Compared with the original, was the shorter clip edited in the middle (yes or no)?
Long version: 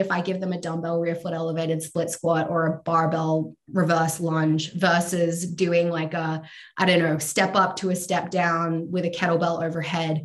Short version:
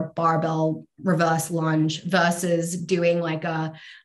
no